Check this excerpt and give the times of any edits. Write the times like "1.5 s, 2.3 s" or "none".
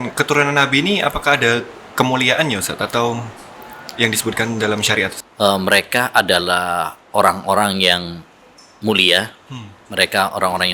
5.2 s